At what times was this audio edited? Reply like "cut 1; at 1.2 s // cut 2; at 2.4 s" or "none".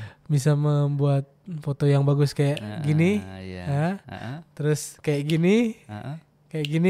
none